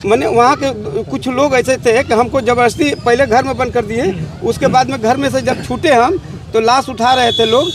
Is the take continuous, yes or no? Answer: yes